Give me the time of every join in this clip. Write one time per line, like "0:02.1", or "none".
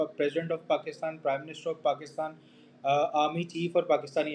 none